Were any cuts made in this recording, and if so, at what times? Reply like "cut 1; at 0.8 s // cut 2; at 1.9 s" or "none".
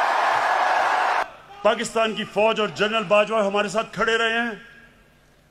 cut 1; at 1.2 s